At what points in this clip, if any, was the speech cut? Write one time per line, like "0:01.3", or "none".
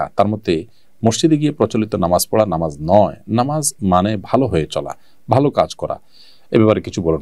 none